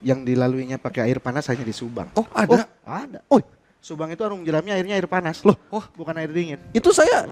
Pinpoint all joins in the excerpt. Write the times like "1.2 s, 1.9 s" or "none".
none